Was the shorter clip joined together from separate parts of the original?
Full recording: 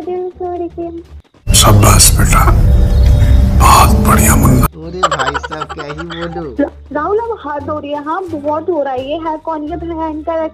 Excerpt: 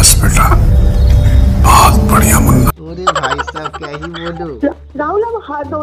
no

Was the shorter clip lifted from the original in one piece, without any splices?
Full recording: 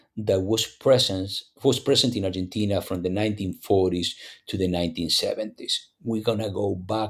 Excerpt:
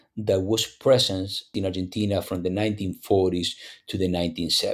no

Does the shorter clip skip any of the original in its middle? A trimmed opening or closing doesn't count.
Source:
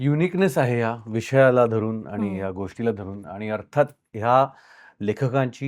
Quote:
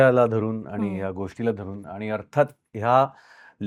no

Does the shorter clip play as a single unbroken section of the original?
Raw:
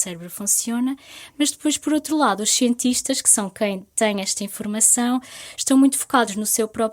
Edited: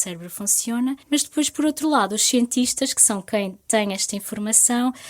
no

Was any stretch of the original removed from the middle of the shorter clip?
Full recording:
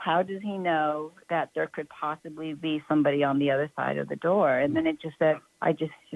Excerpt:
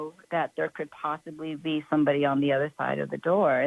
no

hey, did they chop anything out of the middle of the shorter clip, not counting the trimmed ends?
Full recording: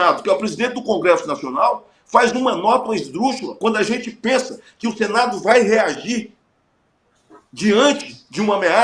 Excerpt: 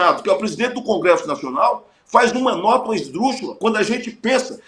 no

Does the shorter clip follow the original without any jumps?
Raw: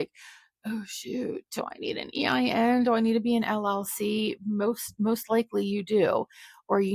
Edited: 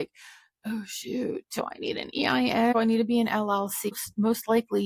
no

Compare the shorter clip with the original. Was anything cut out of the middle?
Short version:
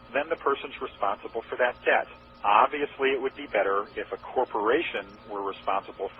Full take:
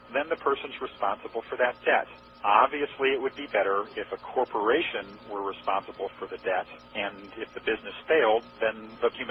no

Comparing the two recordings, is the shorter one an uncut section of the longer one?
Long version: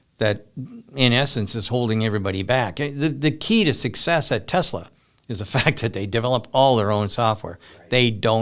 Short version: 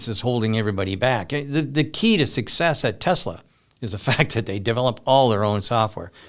yes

